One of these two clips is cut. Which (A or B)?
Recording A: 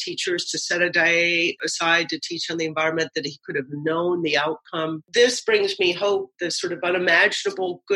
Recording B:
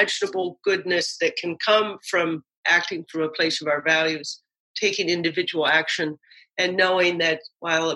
A